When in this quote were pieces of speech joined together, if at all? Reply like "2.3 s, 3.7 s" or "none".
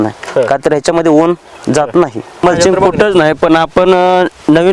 2.4 s